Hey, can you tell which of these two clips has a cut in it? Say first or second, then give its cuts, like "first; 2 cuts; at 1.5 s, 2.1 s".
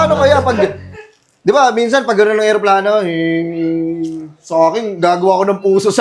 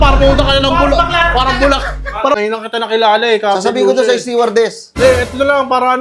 second; 1 cut; at 2.4 s